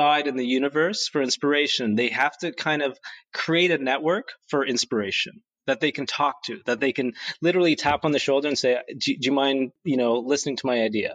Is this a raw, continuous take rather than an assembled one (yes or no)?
no